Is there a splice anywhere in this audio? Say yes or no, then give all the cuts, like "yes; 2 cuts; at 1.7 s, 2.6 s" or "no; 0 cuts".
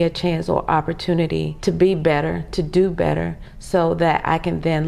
yes; 1 cut; at 1.5 s